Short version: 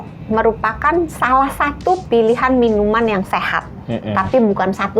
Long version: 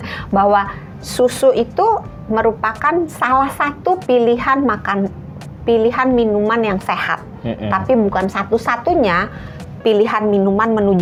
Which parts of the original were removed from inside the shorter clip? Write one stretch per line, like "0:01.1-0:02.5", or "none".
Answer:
0:04.0-0:05.6